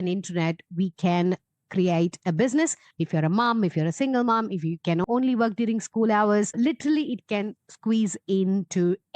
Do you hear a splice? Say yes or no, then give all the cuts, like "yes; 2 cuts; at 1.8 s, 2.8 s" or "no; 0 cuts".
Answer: yes; 2 cuts; at 2.8 s, 5.0 s